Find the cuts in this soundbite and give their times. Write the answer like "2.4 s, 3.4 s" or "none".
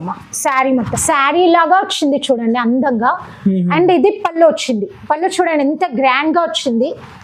0.9 s